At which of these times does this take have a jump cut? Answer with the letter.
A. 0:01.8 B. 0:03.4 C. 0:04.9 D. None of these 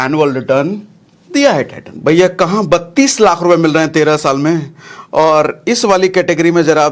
A